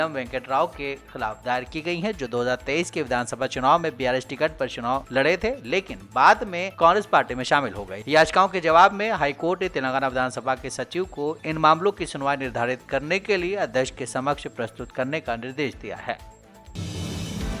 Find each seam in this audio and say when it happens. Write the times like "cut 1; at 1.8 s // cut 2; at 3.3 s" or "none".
cut 1; at 16.7 s